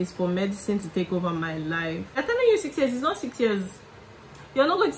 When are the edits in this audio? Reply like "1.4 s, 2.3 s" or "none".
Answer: 2.1 s